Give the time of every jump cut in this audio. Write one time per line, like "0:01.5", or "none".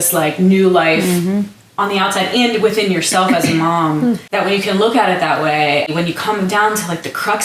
0:04.2
0:05.9

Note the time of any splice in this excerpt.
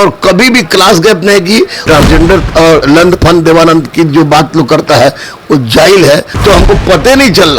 0:01.8
0:06.3

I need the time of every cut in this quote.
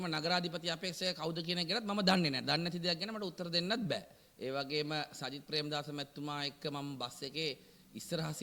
0:04.2

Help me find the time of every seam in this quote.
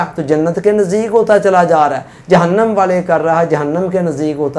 none

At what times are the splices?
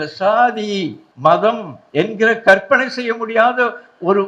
0:01.0
0:01.7

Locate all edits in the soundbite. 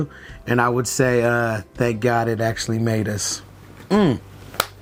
none

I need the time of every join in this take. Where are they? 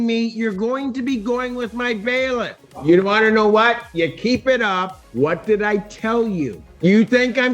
0:02.7
0:05.0
0:06.6

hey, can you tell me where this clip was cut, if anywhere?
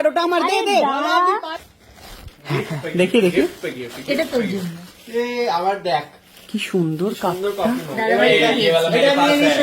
0:01.5

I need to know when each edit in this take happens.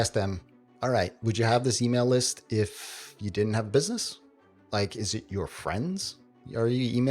0:04.7

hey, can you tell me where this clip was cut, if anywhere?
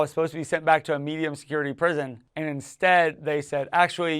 0:02.2

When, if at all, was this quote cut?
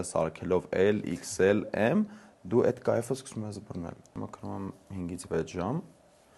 0:04.1

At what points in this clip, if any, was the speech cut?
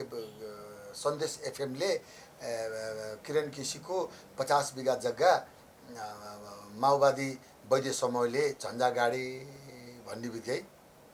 none

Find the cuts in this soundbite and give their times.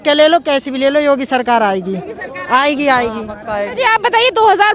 none

